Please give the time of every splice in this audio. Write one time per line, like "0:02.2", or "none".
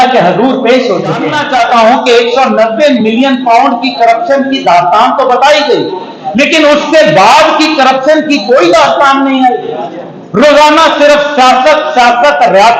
0:01.3